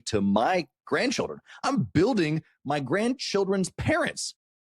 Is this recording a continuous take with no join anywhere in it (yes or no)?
no